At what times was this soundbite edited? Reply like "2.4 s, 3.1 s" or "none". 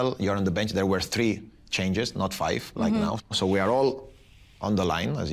3.3 s